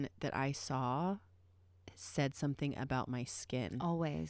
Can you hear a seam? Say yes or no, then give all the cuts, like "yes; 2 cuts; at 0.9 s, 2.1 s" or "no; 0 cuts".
no; 0 cuts